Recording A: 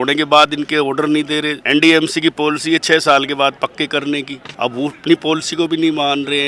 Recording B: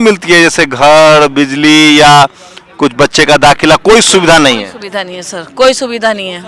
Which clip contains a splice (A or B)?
A